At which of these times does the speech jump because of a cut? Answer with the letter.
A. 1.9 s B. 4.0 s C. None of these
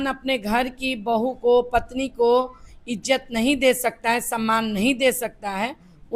C